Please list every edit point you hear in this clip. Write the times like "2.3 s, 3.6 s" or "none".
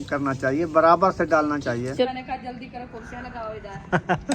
2.0 s